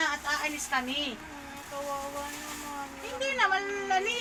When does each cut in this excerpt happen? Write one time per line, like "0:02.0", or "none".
none